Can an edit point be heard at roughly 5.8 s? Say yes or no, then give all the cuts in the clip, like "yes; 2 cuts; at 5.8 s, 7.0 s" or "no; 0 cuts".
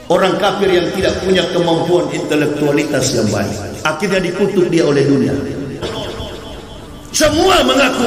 yes; 1 cut; at 5.8 s